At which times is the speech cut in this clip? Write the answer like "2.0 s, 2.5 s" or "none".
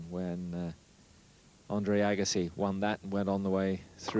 3.2 s